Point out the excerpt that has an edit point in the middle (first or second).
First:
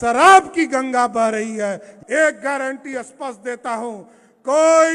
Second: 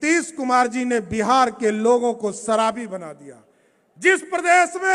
first